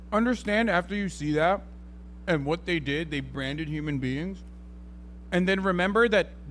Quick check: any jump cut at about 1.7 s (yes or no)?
no